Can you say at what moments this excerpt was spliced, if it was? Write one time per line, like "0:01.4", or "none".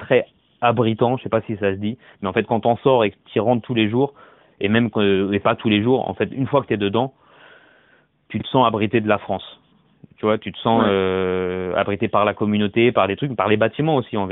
none

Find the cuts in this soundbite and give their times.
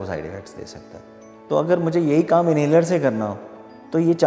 0:01.4

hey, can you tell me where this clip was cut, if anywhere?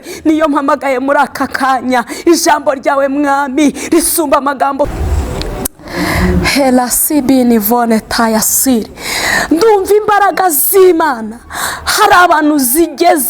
0:04.9

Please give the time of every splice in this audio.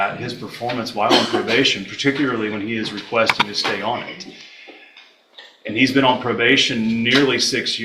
none

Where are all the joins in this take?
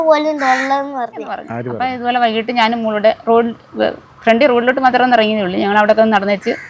0:01.6

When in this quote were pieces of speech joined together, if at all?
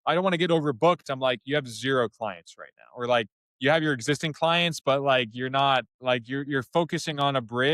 0:05.9

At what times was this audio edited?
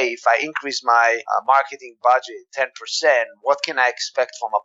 0:01.2
0:02.4

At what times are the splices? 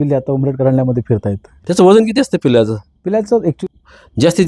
0:01.5
0:03.6

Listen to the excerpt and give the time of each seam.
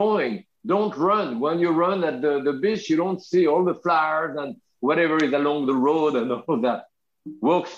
none

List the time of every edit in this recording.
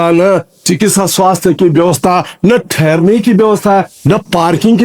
none

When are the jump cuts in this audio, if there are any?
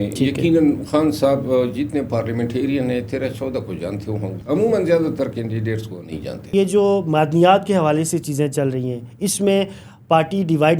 0:04.4
0:06.4

